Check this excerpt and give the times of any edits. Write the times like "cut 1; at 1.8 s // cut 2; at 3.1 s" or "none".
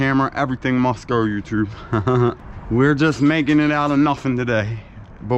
cut 1; at 2.5 s